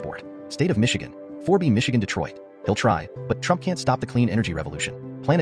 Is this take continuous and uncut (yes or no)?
no